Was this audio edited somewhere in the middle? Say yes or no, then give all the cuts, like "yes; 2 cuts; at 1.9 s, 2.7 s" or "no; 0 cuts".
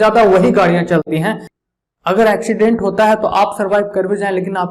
yes; 1 cut; at 1.5 s